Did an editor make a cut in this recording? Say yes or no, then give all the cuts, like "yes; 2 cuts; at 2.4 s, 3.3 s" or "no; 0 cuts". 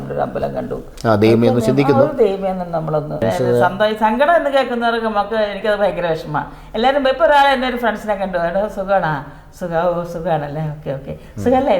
yes; 1 cut; at 3.2 s